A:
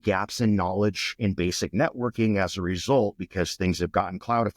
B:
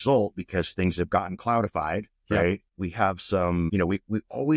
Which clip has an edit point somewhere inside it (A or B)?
B